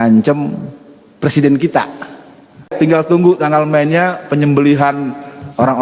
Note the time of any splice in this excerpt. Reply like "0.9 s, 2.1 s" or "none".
2.7 s